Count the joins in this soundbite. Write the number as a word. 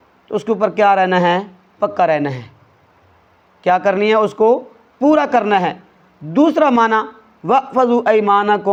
zero